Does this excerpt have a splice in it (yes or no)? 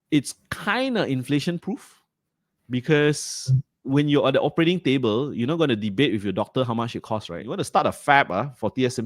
yes